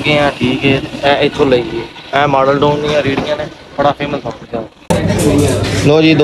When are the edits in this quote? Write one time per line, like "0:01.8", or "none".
0:04.6